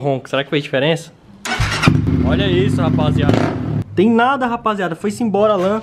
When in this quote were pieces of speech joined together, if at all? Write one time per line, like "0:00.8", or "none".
0:02.1
0:03.8

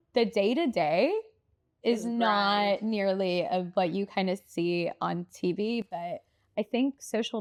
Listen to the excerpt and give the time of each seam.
none

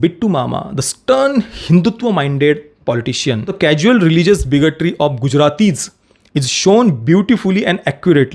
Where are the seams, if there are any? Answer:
0:03.5

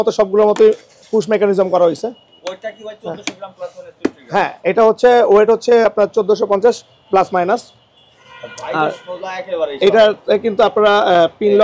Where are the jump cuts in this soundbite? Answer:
none

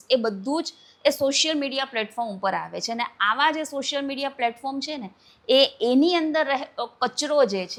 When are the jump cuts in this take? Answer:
none

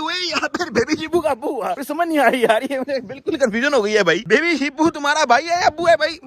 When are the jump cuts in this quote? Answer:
0:04.2

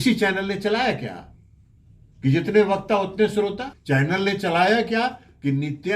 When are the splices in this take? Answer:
0:03.7

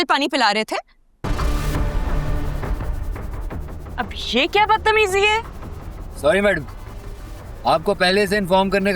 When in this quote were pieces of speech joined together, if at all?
0:01.3

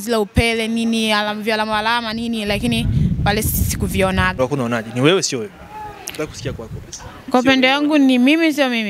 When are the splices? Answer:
0:04.4

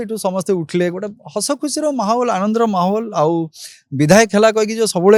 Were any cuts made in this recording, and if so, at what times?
none

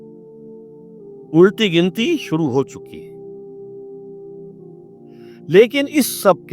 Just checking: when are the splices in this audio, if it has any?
0:03.3
0:05.4

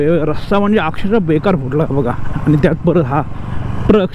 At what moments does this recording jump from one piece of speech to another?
none

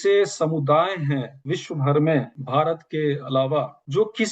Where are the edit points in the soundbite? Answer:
0:01.3
0:02.4

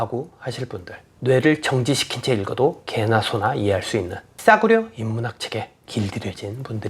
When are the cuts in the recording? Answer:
0:01.1
0:04.3
0:05.8

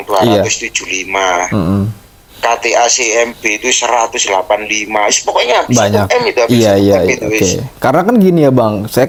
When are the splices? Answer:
none

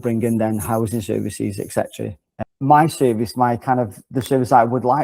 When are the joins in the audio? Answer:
0:02.3

